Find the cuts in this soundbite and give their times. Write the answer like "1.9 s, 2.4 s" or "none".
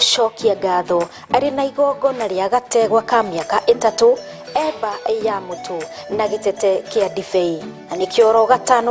none